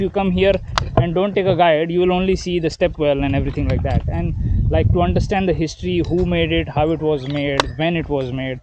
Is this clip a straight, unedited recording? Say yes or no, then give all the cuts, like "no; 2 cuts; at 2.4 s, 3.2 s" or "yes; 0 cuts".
yes; 0 cuts